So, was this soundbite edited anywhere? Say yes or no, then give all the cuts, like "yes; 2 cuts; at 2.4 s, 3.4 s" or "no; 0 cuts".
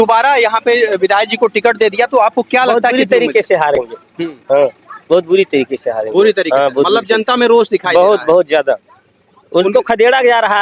no; 0 cuts